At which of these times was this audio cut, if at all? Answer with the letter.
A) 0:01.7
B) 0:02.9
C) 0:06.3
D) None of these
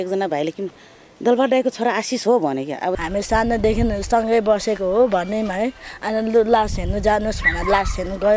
B